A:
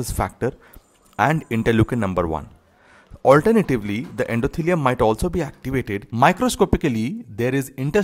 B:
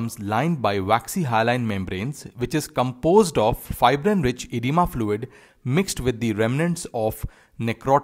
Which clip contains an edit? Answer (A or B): A